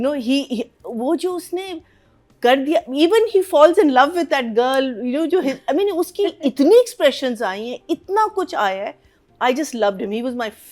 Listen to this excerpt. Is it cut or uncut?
uncut